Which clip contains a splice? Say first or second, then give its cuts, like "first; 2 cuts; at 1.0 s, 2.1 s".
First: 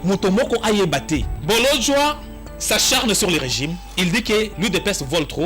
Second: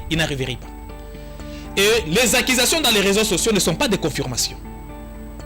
first; 1 cut; at 1.3 s